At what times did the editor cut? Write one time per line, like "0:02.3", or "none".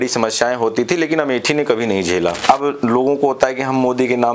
0:02.4